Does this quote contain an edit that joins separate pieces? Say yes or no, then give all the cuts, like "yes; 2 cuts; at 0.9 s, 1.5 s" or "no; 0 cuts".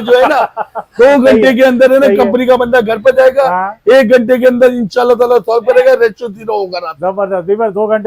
no; 0 cuts